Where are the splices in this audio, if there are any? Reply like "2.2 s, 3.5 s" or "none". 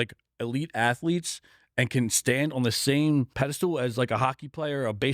3.3 s

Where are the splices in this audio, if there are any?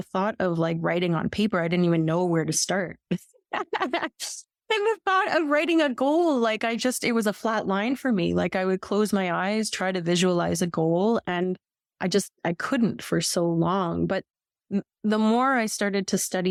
none

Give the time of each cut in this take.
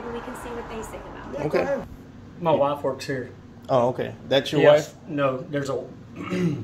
1.9 s

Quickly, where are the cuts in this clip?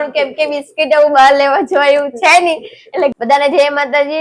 3.1 s

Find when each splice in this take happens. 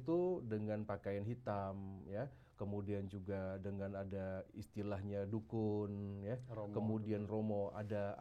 none

